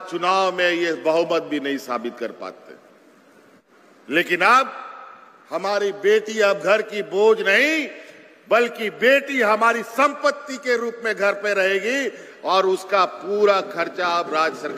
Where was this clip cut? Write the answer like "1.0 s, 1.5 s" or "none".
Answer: 3.6 s